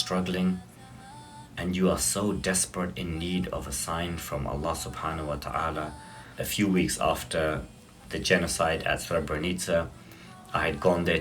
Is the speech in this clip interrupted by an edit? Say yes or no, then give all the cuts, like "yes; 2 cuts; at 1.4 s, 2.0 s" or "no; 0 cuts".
yes; 1 cut; at 6.3 s